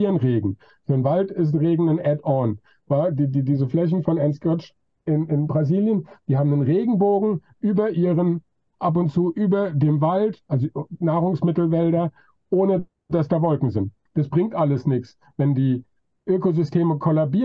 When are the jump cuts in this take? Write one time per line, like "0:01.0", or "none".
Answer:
0:14.0